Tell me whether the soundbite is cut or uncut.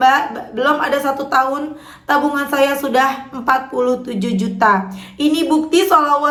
uncut